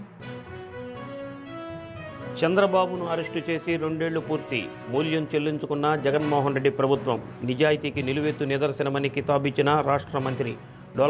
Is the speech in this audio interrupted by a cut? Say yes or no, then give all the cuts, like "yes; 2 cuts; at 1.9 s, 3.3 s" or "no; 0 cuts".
yes; 1 cut; at 1.0 s